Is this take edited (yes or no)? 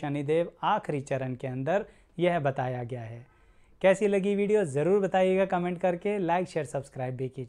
no